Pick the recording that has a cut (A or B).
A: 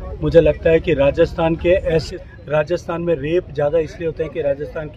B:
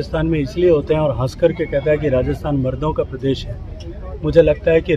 A